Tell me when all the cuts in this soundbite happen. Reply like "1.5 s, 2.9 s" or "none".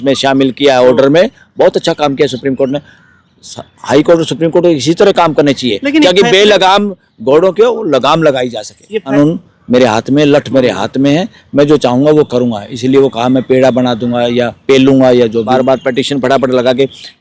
9.0 s, 15.5 s